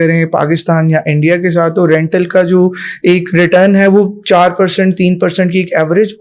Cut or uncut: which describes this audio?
uncut